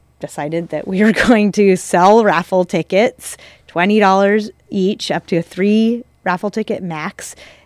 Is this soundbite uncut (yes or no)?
yes